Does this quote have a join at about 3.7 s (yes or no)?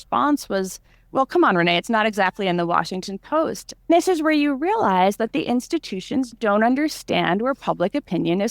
yes